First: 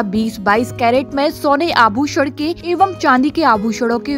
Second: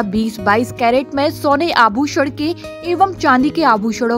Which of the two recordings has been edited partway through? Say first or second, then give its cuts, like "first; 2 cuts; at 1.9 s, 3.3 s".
first; 1 cut; at 2.6 s